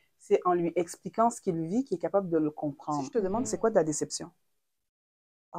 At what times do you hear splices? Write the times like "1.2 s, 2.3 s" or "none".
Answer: 3.1 s